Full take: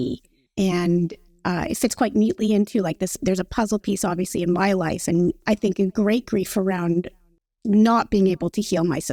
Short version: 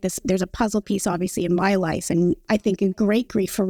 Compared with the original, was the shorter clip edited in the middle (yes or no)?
no